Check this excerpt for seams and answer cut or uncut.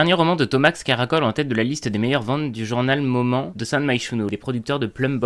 uncut